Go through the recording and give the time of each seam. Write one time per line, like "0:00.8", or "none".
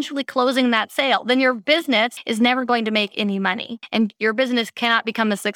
0:02.2
0:03.7